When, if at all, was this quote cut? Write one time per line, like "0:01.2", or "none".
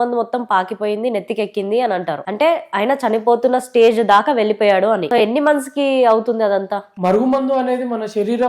0:05.0
0:06.9